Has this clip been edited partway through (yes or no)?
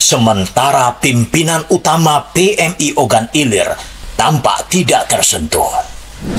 no